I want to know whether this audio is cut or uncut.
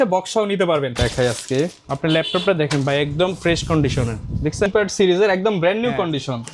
cut